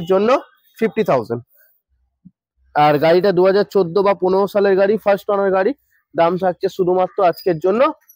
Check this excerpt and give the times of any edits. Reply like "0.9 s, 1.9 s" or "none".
1.8 s